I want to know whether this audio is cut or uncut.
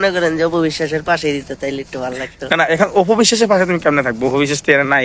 uncut